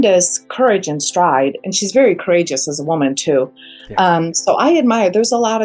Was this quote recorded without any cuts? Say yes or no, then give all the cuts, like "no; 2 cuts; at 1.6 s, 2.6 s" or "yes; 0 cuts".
yes; 0 cuts